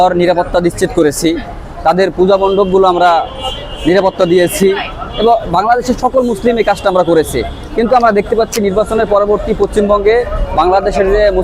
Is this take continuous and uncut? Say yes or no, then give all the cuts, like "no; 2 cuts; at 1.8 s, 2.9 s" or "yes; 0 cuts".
yes; 0 cuts